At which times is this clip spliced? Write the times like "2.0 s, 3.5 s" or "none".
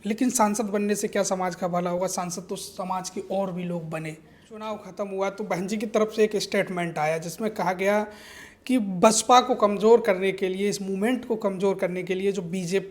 4.9 s

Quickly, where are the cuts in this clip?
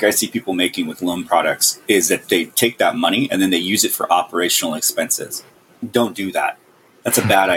2.2 s, 5.8 s

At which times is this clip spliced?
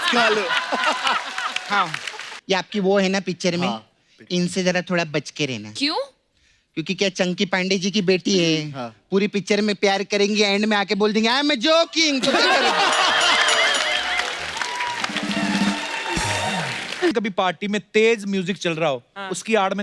2.3 s, 17.1 s

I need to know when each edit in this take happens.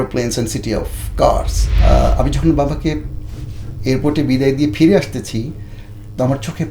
1.6 s

